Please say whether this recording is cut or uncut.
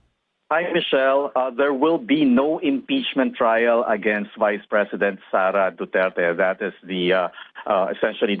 cut